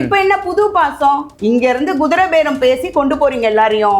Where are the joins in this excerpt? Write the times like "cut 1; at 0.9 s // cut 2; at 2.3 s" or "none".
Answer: cut 1; at 1.3 s